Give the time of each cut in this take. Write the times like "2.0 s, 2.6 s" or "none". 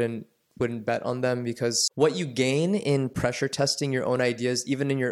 1.8 s